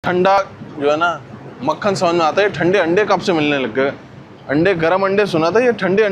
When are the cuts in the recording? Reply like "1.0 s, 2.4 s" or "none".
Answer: none